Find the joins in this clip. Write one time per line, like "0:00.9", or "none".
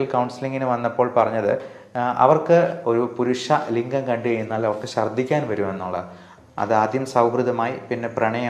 0:02.8
0:06.2